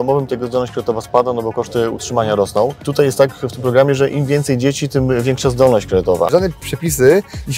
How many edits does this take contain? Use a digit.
2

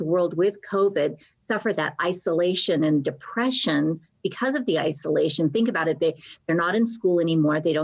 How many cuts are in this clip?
0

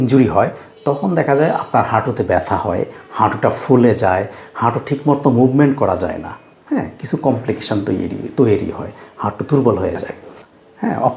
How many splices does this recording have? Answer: 1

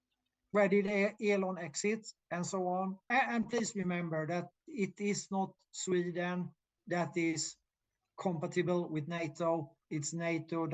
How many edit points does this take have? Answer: 1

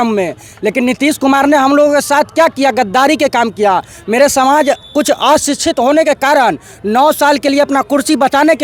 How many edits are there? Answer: 0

